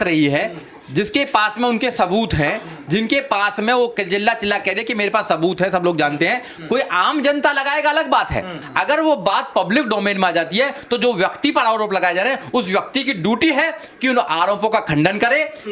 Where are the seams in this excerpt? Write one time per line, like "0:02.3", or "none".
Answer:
0:08.6